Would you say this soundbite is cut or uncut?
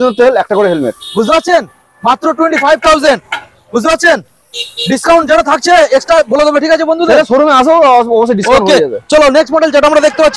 uncut